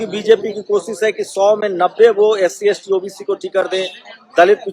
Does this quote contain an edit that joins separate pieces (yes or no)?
no